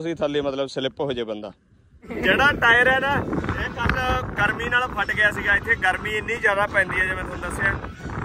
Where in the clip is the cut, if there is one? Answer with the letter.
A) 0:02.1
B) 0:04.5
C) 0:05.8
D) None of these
A